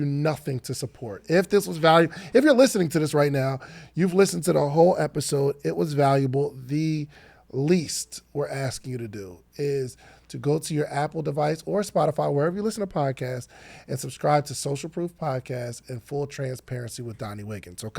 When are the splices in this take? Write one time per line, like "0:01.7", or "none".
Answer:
none